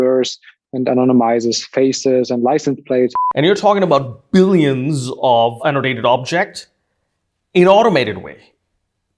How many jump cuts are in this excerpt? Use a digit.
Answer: 1